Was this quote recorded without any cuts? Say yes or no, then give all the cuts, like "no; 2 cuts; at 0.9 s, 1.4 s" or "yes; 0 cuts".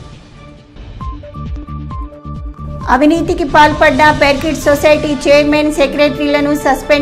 yes; 0 cuts